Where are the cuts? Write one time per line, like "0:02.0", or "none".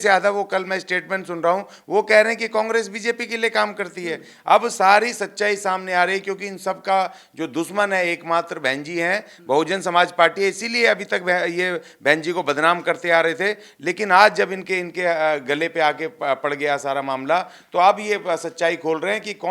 none